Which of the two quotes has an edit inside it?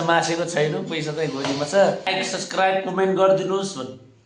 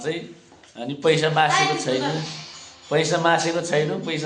first; 1 cut; at 2.1 s

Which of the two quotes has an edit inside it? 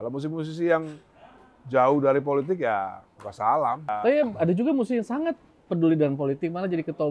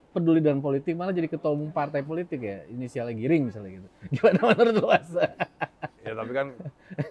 first; 1 cut; at 3.9 s

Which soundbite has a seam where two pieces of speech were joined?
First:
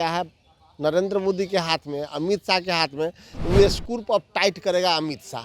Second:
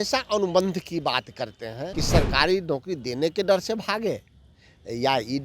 second; 1 cut; at 1.9 s

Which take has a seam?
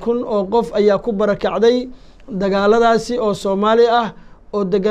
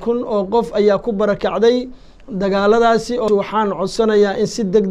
second; 1 cut; at 3.3 s

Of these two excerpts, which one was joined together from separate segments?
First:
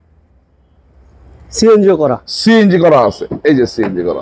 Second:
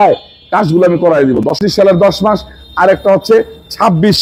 second; 1 cut; at 1.6 s

